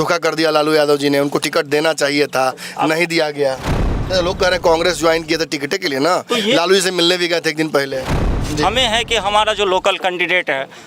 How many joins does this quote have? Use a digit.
2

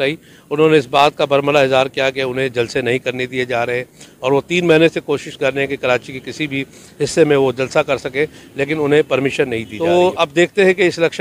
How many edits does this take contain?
1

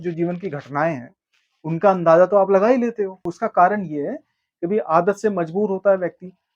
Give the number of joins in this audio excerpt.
1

